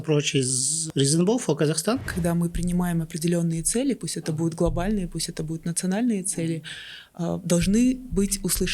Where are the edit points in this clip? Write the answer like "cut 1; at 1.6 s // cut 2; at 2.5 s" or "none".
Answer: cut 1; at 2.1 s